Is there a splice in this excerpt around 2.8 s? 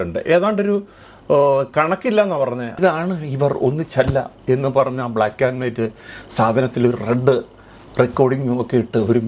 yes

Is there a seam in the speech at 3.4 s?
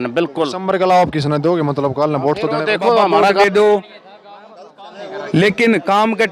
yes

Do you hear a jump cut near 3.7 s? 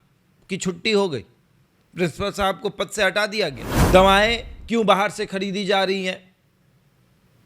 yes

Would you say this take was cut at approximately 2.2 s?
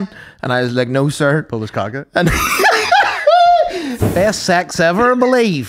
no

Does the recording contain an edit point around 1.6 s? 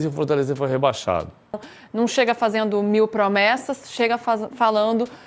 yes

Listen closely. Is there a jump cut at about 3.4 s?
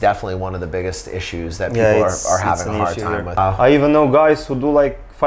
yes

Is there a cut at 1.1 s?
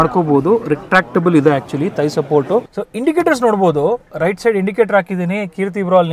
no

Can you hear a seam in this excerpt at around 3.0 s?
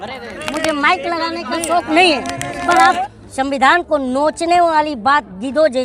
yes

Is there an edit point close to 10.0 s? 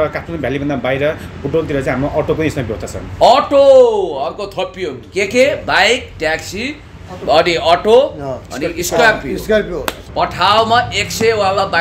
yes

